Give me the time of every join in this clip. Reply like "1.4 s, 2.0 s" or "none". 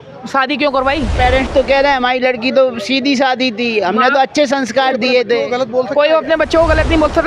1.1 s

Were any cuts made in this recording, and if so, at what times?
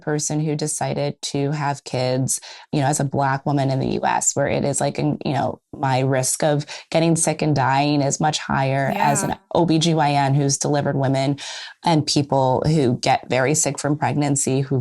2.6 s

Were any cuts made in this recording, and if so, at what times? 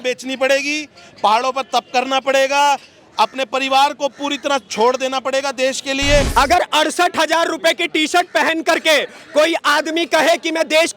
6.3 s

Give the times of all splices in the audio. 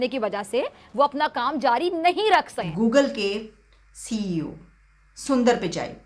2.6 s

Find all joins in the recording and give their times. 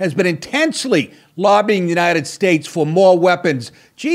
none

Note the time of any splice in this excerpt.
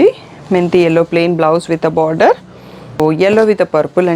3.0 s

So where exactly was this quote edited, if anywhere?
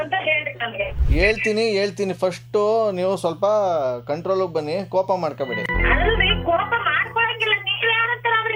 none

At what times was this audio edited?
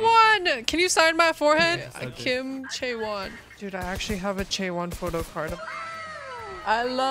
1.9 s, 3.4 s, 5.6 s

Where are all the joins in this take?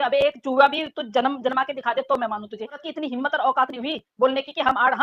2.8 s

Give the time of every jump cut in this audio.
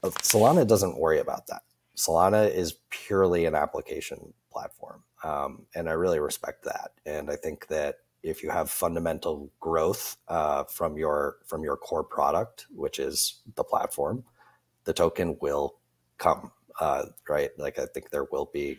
none

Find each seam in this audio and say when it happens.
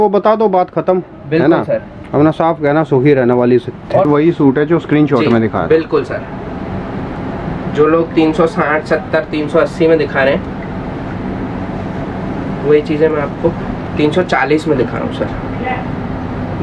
4.1 s

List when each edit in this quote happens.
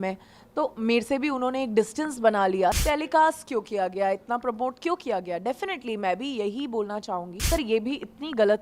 2.8 s, 7.5 s

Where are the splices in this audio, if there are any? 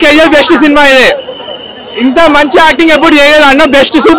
none

